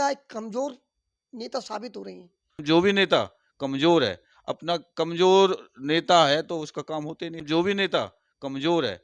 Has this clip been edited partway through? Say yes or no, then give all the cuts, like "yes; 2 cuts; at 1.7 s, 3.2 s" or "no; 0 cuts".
yes; 2 cuts; at 2.6 s, 7.4 s